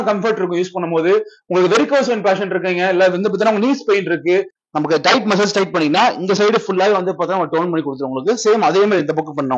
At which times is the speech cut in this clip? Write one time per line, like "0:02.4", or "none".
0:04.6